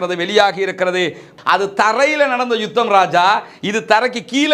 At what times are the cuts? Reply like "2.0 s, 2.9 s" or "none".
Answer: 1.3 s